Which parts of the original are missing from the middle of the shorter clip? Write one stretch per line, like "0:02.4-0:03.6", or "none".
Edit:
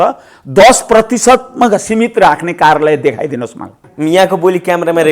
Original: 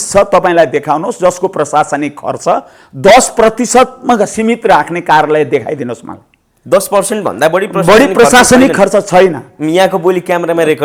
0:06.3-0:09.5